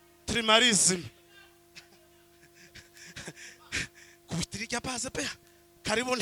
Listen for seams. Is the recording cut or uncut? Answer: uncut